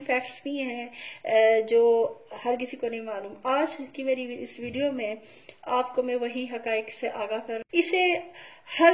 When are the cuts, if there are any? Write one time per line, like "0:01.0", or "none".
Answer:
0:07.6